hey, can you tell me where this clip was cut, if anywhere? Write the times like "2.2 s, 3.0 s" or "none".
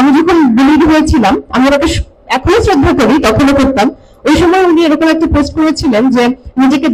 none